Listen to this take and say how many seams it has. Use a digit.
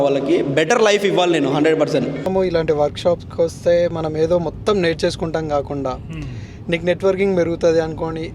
1